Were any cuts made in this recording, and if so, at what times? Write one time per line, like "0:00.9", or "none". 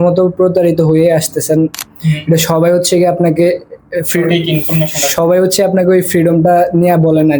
0:01.9